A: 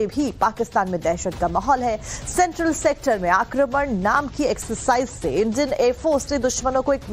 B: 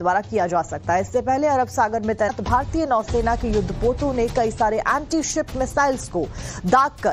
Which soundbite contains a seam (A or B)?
B